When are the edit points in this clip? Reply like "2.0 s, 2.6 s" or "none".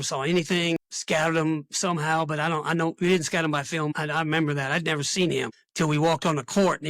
0.8 s, 4.0 s, 5.6 s